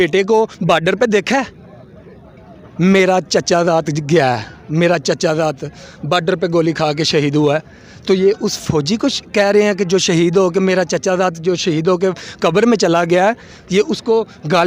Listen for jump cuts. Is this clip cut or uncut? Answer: uncut